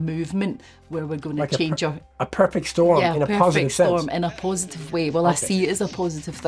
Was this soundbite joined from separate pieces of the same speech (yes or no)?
no